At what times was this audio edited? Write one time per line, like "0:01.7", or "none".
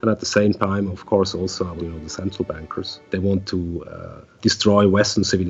0:01.8
0:03.0
0:04.4